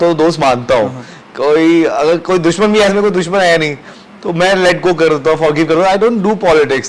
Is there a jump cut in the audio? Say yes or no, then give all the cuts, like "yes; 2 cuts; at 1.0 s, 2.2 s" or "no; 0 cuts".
no; 0 cuts